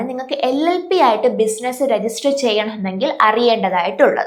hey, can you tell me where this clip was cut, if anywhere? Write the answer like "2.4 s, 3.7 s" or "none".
none